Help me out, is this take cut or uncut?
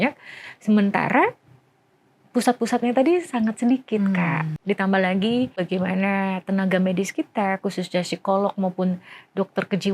cut